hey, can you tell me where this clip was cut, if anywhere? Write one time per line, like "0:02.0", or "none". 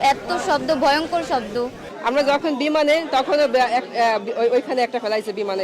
0:01.9